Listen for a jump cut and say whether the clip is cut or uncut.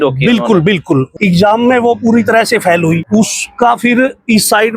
cut